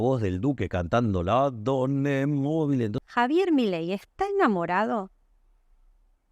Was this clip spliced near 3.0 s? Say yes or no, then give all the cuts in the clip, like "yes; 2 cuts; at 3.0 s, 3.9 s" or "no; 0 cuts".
yes; 1 cut; at 3.0 s